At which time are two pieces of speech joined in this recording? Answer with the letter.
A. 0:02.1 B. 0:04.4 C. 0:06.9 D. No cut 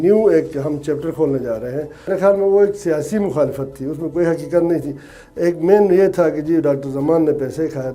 A